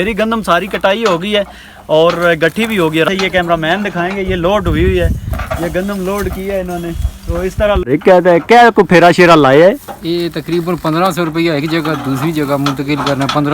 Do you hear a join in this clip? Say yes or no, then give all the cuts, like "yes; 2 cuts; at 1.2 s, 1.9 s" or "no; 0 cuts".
yes; 2 cuts; at 3.1 s, 7.9 s